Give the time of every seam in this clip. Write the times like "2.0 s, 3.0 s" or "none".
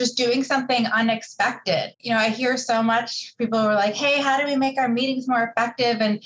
2.0 s